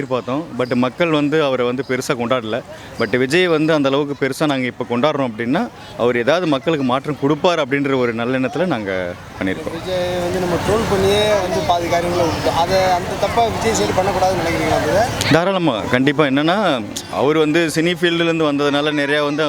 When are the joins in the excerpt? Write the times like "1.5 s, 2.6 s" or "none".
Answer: none